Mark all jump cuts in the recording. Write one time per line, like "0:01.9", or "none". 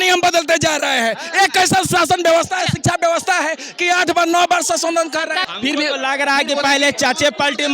0:05.5